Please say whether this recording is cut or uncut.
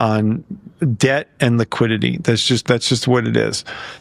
uncut